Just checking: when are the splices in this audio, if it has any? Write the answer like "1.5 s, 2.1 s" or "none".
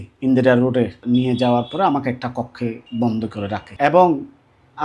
1.0 s, 2.8 s, 3.7 s